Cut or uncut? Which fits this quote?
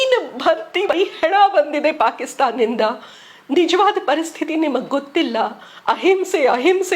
cut